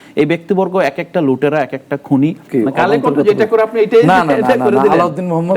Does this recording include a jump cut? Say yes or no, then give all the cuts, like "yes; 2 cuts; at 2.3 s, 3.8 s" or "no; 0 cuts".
yes; 1 cut; at 2.4 s